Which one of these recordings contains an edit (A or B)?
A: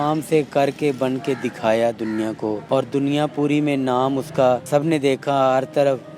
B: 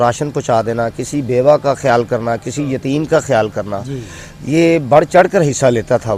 A